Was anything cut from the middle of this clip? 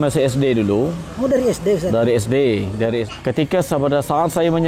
yes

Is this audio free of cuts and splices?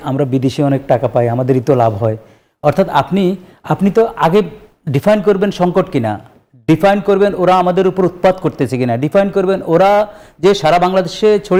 yes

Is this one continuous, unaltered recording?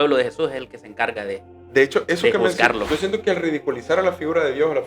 no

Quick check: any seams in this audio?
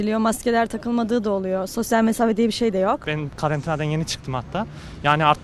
yes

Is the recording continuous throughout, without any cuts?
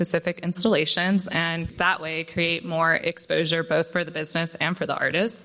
yes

